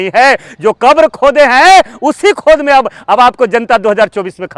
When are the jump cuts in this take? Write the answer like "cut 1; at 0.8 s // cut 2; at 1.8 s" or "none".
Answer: none